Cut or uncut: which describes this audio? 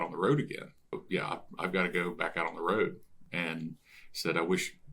cut